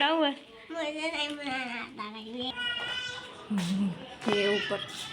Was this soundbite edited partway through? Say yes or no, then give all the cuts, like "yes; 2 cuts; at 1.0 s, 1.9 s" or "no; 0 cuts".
yes; 1 cut; at 2.5 s